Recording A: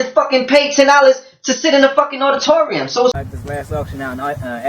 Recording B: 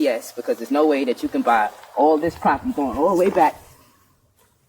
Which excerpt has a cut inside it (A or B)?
A